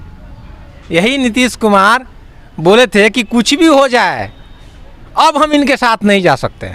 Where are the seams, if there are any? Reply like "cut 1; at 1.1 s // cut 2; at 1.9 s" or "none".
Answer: none